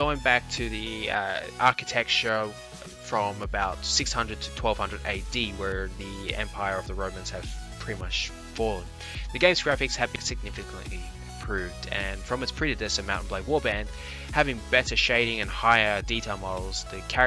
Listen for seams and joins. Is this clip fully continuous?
yes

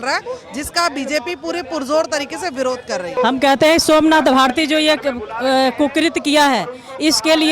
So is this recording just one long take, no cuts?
no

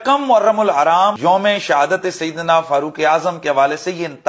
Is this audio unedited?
no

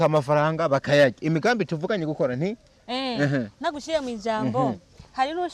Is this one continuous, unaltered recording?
yes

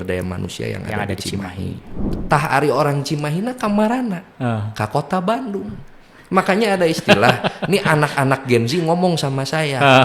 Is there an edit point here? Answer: yes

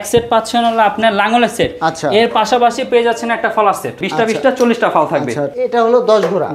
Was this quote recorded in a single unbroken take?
no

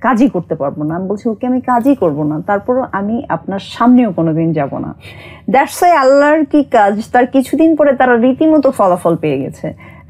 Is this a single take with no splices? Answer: yes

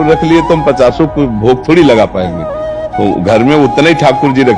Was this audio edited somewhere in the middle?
no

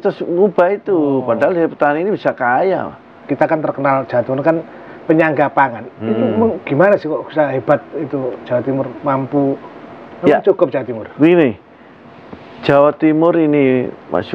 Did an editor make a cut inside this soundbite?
yes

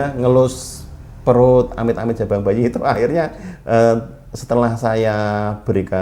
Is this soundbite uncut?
yes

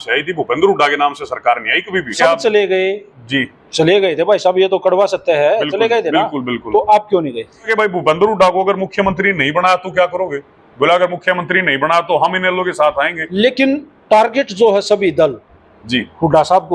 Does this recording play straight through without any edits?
no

